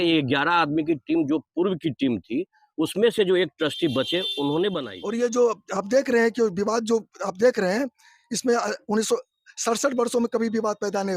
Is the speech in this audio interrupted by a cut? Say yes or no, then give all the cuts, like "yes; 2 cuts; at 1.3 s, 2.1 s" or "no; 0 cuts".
yes; 1 cut; at 4.9 s